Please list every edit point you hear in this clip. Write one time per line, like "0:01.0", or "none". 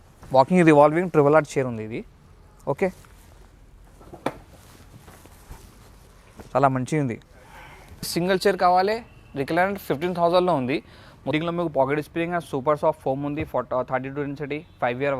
0:08.1
0:11.3